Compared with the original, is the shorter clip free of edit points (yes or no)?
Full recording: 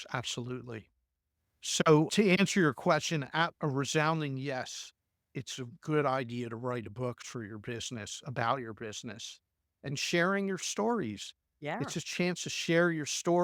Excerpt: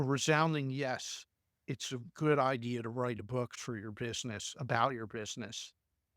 yes